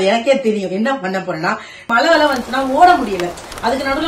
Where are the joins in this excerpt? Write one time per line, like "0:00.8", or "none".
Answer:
0:01.8